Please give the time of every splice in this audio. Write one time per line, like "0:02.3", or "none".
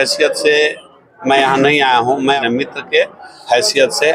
0:02.4